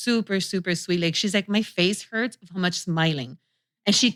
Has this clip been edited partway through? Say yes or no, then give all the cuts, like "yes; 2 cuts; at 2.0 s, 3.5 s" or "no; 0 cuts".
no; 0 cuts